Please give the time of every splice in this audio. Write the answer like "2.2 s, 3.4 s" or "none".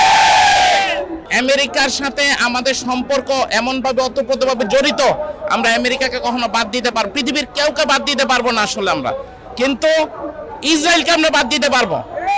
1.2 s